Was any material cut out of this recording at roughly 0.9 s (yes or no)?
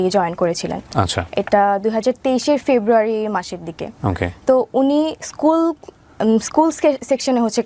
no